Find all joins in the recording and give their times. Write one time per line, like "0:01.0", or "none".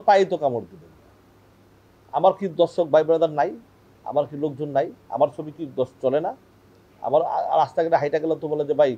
none